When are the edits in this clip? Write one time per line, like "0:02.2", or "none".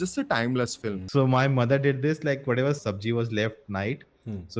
0:01.0
0:02.8